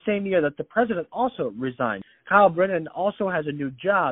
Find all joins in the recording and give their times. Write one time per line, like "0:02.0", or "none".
0:02.0